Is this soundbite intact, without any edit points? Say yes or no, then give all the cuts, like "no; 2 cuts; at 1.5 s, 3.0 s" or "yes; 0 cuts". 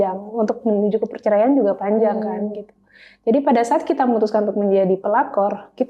yes; 0 cuts